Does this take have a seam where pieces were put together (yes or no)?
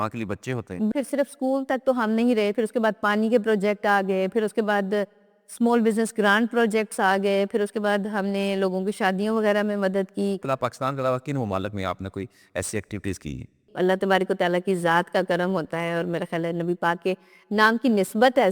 yes